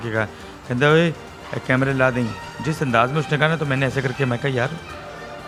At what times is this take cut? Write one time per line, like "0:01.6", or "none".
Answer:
none